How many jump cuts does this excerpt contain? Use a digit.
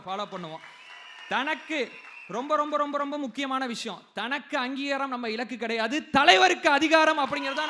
0